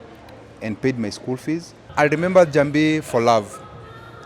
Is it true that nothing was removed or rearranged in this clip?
no; 1 cut; at 1.8 s

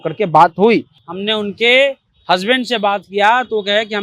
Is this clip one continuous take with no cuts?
no; 1 cut; at 1.0 s

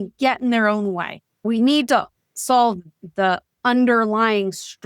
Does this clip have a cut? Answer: yes; 1 cut; at 1.4 s

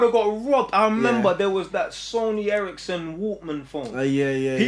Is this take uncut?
yes; 0 cuts

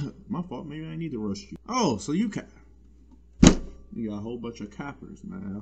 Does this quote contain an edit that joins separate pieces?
no; 0 cuts

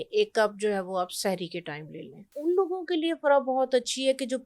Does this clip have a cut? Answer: yes; 1 cut; at 2.4 s

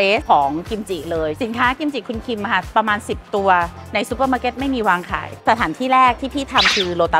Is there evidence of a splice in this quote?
yes; 2 cuts; at 1.3 s, 5.4 s

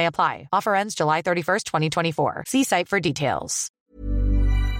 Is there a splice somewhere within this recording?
yes; 1 cut; at 3.8 s

